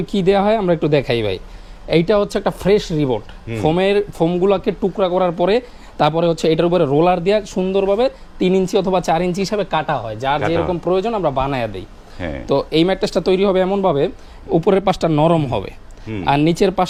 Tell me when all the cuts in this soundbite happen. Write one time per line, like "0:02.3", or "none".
none